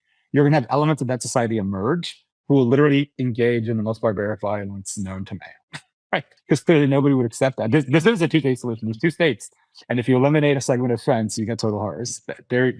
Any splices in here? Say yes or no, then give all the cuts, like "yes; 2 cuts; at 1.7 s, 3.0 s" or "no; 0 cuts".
yes; 1 cut; at 6.3 s